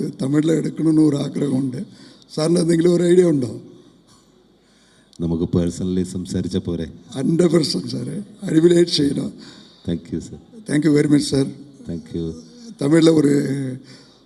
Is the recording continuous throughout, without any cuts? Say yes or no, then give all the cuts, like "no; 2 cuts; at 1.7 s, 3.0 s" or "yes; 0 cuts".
yes; 0 cuts